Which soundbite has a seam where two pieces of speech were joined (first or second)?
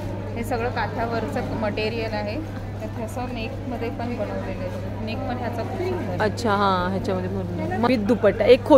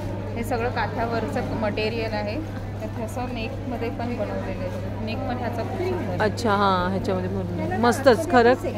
first